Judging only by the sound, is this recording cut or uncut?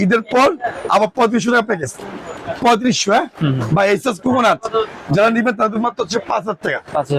uncut